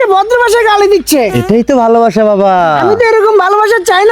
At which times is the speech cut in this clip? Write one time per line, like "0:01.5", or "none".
none